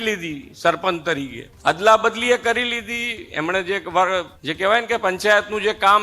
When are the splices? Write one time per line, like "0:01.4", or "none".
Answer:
0:01.4
0:04.4